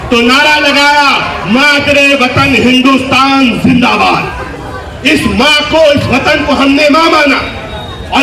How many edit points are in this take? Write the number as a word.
zero